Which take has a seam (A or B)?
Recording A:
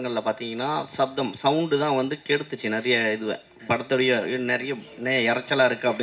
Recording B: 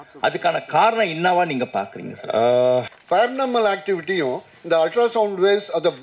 B